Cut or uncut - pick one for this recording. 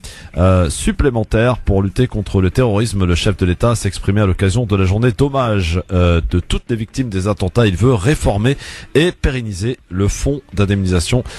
uncut